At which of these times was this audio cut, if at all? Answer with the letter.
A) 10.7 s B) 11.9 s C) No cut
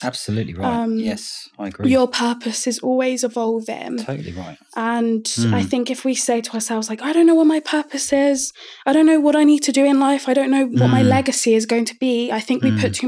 A